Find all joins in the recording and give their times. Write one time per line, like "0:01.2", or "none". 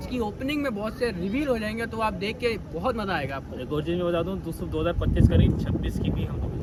none